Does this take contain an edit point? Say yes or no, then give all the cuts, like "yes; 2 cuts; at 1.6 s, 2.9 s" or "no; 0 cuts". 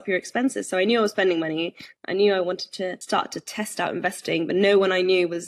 yes; 1 cut; at 3.0 s